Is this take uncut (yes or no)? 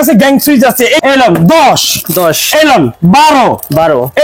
no